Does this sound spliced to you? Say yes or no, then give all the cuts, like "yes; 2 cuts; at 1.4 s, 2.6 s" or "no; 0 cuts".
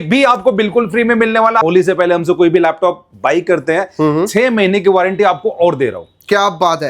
yes; 1 cut; at 1.6 s